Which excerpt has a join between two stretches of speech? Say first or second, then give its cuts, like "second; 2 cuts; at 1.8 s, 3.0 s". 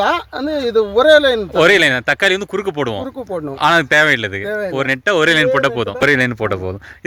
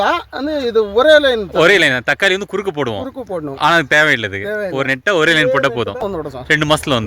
second; 1 cut; at 6.0 s